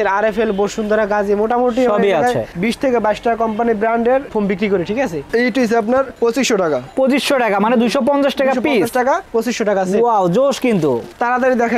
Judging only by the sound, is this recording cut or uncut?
cut